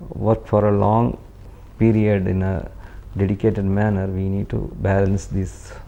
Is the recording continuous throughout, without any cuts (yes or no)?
yes